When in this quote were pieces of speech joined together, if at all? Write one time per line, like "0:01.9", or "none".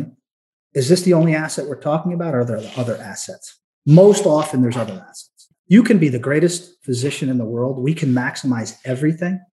0:03.7
0:05.5